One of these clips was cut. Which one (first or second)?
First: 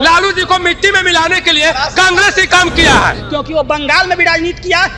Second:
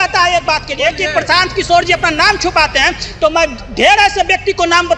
first